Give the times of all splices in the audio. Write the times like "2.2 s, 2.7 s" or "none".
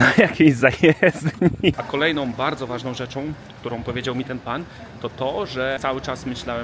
1.8 s, 5.8 s